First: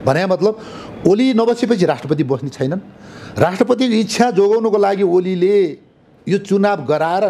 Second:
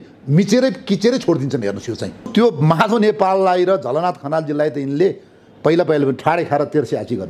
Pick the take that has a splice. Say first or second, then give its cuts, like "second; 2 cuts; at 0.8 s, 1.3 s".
second; 1 cut; at 2.1 s